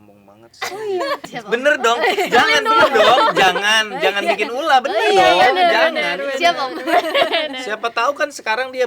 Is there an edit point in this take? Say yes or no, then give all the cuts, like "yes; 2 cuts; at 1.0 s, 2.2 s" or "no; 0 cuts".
yes; 1 cut; at 1.2 s